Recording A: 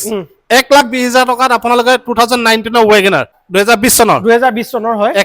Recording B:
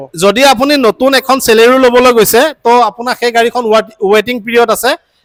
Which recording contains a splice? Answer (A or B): A